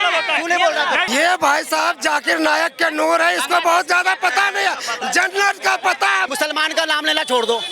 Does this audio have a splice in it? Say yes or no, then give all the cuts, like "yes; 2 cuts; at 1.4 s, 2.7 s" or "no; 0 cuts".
yes; 2 cuts; at 1.1 s, 6.3 s